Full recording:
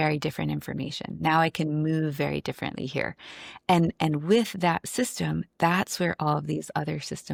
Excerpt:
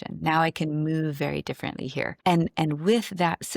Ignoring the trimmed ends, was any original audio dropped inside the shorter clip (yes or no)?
yes